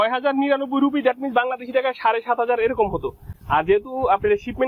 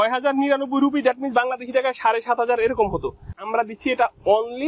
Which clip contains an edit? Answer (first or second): second